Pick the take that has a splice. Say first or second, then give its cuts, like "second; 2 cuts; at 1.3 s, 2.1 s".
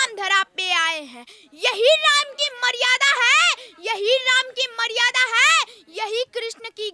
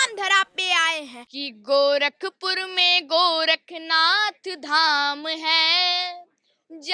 second; 1 cut; at 1.2 s